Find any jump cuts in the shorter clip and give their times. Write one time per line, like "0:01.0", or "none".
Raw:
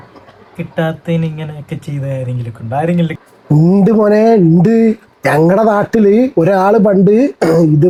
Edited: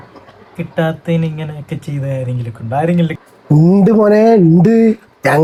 none